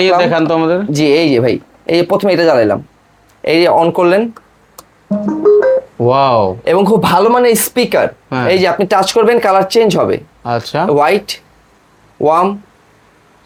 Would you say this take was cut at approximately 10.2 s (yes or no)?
no